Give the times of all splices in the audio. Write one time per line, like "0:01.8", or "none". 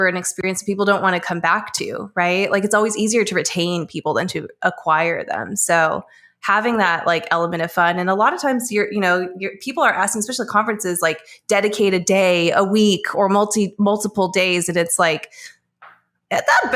none